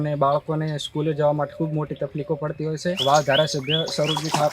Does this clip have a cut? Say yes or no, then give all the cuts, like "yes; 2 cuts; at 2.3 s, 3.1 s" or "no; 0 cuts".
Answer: yes; 1 cut; at 3.0 s